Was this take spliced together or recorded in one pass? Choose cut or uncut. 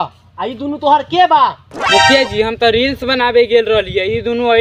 uncut